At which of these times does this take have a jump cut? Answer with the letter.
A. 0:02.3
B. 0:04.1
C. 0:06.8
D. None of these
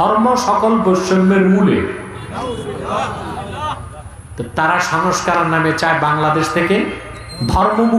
D